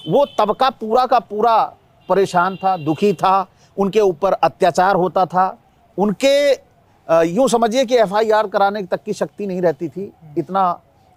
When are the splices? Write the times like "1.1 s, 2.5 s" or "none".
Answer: none